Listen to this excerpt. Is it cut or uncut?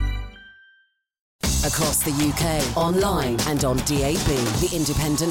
cut